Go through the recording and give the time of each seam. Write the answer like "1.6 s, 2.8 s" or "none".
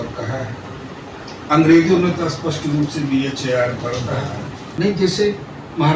4.7 s